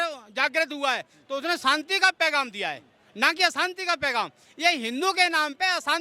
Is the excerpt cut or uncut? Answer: uncut